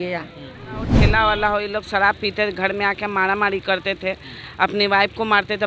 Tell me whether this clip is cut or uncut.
cut